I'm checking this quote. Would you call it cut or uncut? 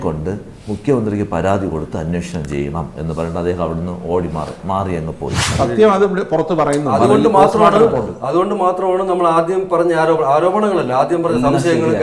cut